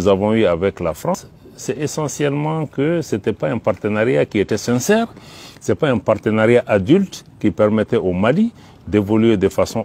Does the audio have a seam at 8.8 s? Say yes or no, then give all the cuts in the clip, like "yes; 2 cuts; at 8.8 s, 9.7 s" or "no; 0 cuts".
no; 1 cut; at 1.2 s